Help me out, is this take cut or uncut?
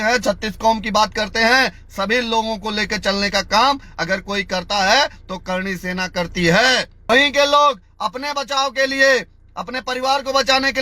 cut